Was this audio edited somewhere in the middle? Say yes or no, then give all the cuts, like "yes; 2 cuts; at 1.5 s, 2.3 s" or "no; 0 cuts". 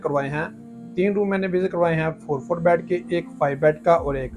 no; 0 cuts